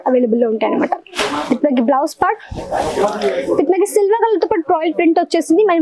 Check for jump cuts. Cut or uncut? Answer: uncut